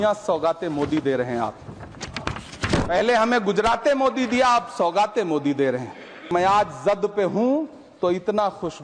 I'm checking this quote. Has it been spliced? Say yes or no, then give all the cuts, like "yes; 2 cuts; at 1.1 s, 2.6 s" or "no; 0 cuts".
yes; 1 cut; at 6.3 s